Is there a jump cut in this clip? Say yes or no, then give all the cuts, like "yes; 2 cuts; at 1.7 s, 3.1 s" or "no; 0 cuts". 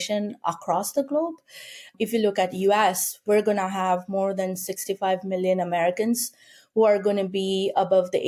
no; 0 cuts